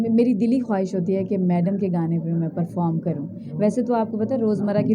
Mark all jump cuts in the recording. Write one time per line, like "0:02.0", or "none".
none